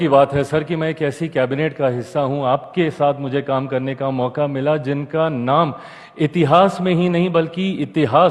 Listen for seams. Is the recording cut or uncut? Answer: uncut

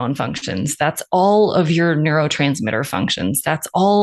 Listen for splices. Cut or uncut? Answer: uncut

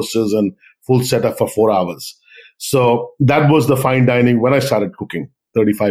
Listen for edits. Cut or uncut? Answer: uncut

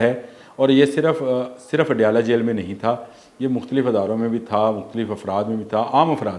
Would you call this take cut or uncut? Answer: uncut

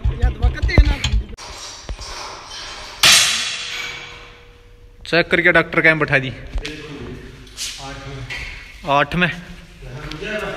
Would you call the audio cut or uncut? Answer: cut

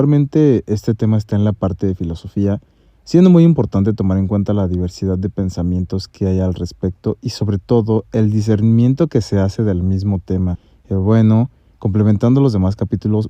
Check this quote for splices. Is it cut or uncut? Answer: uncut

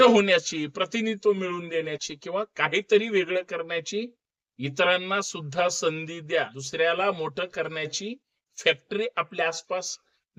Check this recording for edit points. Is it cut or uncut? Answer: cut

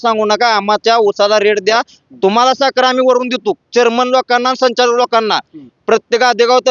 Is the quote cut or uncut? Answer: uncut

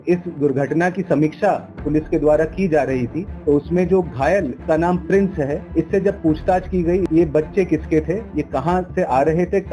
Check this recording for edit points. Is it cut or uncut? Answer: cut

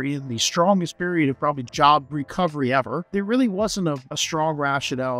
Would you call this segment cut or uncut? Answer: cut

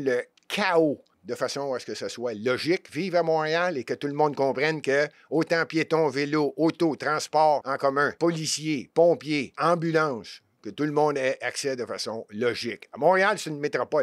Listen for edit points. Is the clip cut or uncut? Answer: cut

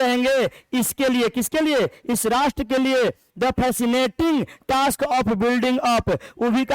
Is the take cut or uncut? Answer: uncut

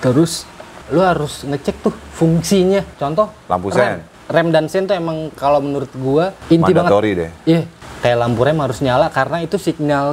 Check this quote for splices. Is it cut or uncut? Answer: cut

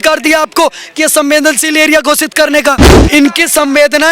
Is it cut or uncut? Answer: cut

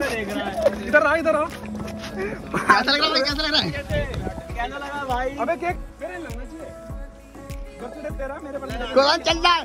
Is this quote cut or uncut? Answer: cut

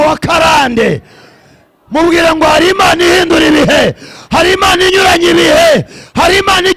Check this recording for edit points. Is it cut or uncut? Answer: uncut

